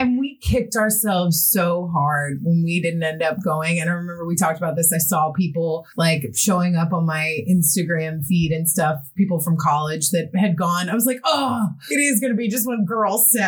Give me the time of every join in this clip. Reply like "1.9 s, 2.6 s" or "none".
5.9 s, 11.8 s